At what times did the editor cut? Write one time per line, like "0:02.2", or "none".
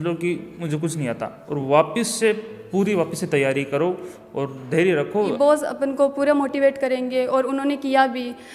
0:05.3